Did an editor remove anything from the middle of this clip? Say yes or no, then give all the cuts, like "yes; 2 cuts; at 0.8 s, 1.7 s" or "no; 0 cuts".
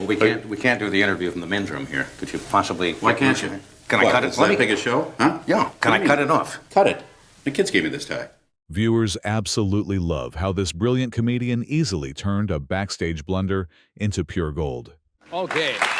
no; 0 cuts